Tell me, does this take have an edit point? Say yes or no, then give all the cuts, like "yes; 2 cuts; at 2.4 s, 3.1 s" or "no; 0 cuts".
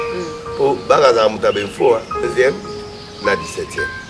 yes; 1 cut; at 2.3 s